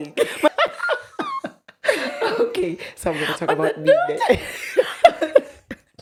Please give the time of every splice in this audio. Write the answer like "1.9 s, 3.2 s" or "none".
none